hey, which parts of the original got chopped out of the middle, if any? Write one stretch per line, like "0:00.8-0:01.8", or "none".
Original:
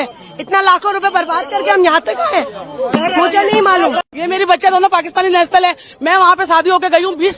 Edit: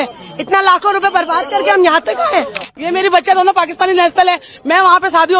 0:02.7-0:04.1